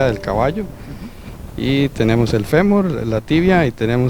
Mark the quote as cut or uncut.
uncut